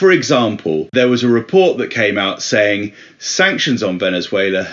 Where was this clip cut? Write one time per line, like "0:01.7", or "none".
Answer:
0:00.9